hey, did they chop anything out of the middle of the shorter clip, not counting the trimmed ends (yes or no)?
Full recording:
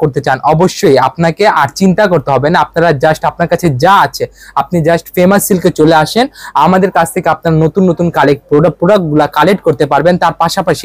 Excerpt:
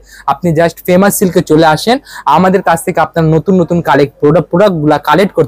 no